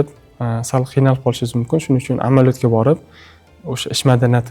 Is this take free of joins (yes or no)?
yes